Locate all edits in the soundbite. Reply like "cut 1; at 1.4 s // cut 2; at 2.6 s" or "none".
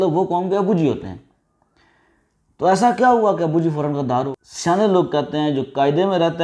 cut 1; at 4.4 s